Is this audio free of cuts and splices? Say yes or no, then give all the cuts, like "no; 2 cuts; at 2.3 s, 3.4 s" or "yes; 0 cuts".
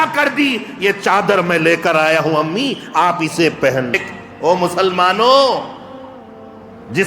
no; 1 cut; at 3.9 s